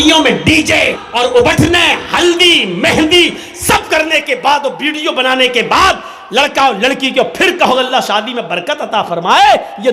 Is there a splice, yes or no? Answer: yes